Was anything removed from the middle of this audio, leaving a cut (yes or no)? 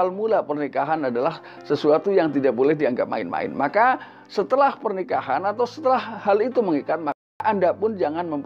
yes